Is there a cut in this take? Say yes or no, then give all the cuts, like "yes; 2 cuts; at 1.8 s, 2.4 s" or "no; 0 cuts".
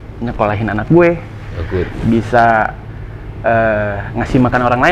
no; 0 cuts